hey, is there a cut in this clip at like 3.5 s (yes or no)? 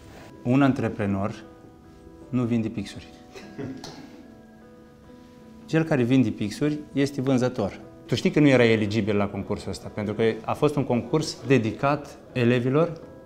no